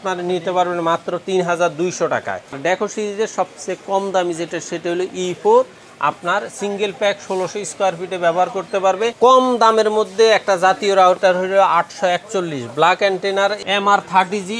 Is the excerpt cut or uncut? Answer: cut